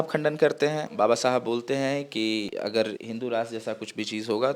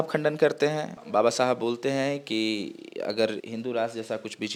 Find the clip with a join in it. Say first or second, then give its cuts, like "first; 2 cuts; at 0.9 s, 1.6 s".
first; 2 cuts; at 0.8 s, 2.5 s